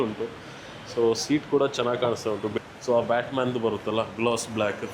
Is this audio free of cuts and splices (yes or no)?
no